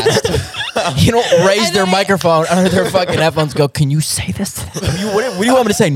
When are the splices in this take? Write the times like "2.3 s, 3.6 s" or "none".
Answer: 5.0 s

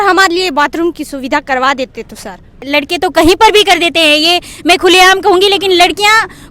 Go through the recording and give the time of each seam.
2.6 s

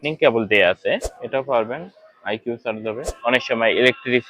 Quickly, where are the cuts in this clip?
1.1 s, 3.1 s

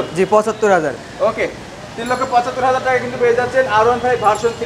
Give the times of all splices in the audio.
none

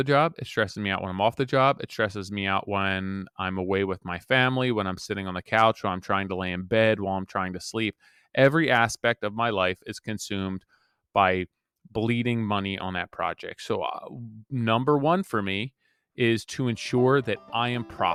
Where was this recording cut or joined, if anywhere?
none

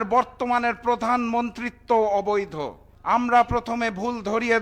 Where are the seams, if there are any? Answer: 2.9 s

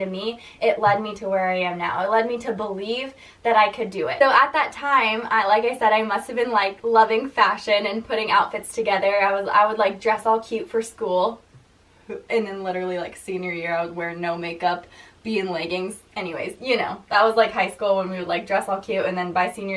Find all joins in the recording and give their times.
none

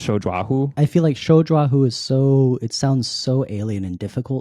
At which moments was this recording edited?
none

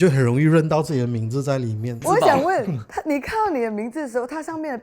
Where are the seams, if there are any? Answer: 2.0 s

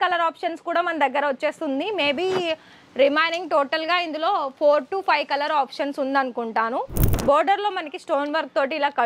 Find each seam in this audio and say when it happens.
7.0 s

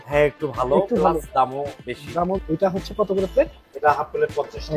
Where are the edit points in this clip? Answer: 2.4 s

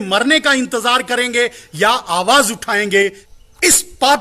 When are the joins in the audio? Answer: 3.2 s

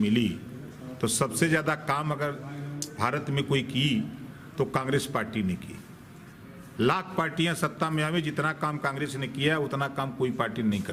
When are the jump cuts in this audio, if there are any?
none

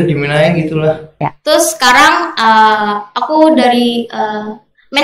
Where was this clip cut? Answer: 1.1 s

